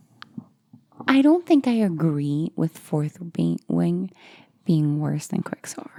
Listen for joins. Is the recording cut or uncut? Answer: uncut